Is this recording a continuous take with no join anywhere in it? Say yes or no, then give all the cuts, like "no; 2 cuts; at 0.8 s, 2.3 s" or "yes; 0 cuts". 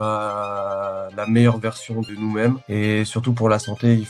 no; 2 cuts; at 2.1 s, 2.6 s